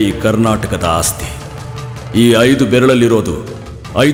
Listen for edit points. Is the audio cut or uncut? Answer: uncut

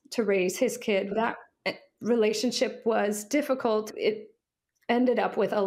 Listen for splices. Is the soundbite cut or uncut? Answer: cut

